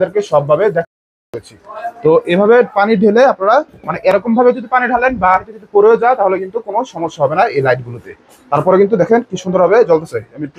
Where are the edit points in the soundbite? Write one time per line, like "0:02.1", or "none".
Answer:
none